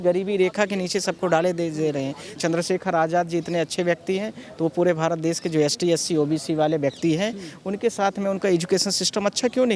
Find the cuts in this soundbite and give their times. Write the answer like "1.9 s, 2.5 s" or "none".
2.3 s